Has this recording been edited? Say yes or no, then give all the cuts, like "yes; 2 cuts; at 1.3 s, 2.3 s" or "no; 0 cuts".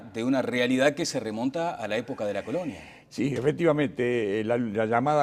yes; 1 cut; at 3.6 s